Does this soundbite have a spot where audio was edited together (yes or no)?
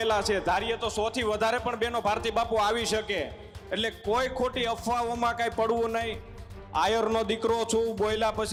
no